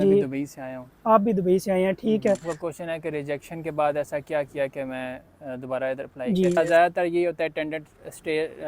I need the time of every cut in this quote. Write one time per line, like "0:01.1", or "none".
0:02.5
0:06.6